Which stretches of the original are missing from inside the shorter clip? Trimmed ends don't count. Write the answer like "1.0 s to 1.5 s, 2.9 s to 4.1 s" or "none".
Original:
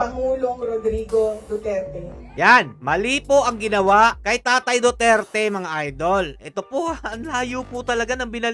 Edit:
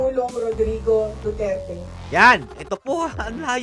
2.8 s to 6.4 s